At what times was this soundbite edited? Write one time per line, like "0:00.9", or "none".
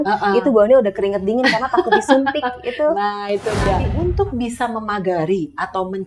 0:03.9